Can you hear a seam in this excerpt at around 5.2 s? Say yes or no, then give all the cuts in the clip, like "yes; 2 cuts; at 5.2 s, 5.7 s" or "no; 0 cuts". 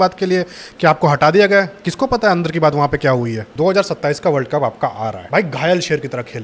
yes; 2 cuts; at 3.4 s, 5.2 s